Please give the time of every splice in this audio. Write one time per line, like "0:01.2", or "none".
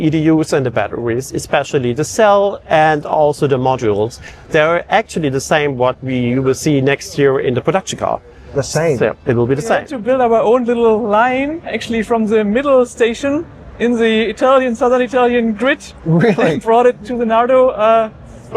0:09.8